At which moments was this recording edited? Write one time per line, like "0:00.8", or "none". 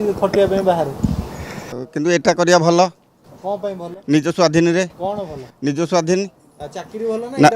0:01.8